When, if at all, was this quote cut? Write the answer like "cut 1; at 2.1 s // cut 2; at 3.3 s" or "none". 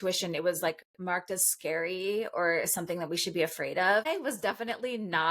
cut 1; at 4.0 s